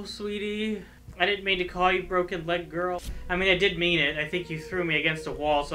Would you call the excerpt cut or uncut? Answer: cut